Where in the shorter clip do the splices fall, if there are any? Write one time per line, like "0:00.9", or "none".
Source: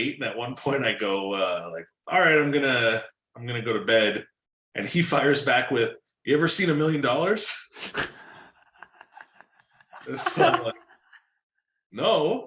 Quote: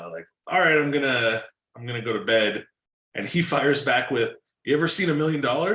none